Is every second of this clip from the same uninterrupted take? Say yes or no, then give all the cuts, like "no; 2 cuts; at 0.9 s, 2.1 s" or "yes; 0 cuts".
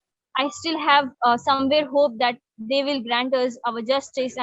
yes; 0 cuts